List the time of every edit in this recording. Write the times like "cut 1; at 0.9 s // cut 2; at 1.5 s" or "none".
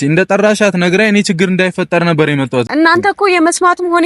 cut 1; at 2.7 s